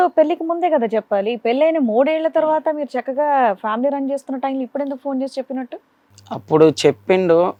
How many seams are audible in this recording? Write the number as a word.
zero